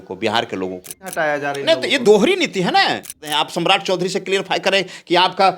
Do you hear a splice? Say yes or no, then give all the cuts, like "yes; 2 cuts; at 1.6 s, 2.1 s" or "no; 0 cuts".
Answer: yes; 2 cuts; at 1.1 s, 3.2 s